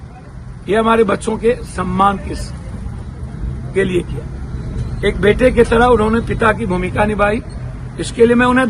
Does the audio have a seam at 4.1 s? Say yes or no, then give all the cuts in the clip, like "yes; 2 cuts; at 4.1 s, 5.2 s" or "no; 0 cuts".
no; 0 cuts